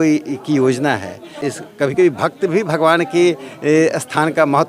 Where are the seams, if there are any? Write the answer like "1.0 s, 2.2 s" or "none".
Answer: 1.5 s